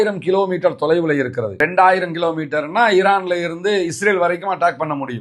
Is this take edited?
yes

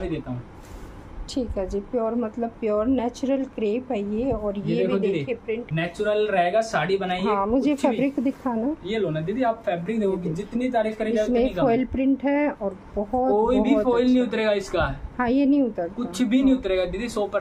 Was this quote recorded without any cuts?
yes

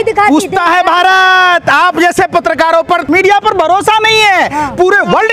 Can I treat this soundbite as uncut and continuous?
yes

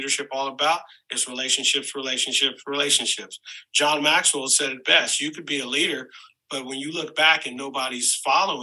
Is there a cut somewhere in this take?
no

